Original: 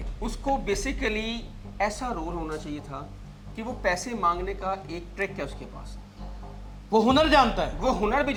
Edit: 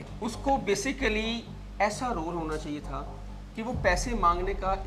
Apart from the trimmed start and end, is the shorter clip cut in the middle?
no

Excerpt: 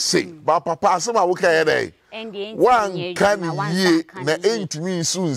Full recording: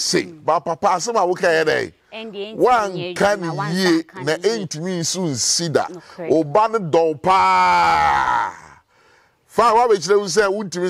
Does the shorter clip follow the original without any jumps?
yes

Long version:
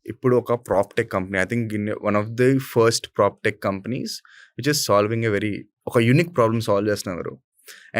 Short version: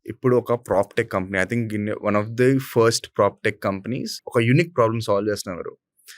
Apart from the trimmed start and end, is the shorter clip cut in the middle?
yes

